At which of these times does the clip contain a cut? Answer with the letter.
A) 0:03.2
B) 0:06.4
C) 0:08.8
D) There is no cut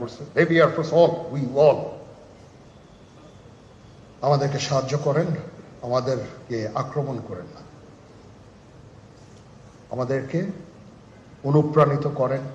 C